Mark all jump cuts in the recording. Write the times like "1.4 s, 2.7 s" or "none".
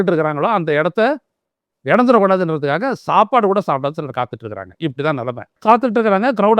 5.5 s